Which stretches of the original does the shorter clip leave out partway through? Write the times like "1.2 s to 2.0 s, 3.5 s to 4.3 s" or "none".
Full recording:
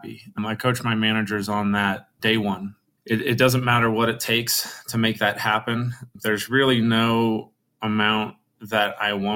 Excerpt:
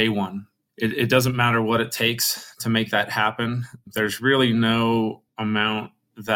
7.5 s to 7.7 s